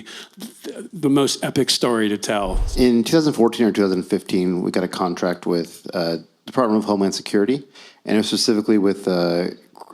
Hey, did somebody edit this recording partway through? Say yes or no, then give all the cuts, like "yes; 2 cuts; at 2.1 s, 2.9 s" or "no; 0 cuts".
yes; 1 cut; at 2.6 s